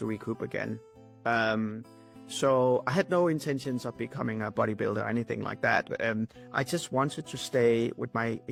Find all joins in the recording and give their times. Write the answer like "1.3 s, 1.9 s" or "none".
none